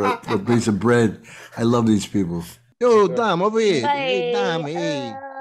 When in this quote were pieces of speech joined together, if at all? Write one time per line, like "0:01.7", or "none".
0:02.6